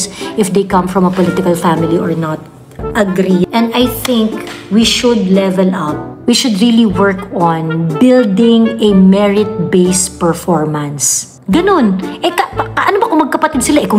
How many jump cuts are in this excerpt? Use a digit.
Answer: 1